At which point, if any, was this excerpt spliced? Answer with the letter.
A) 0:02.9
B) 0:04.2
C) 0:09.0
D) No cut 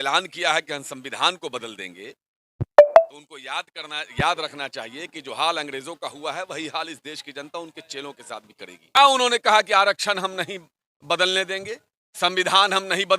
C